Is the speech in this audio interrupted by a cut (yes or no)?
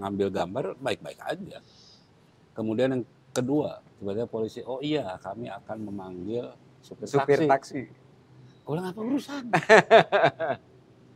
no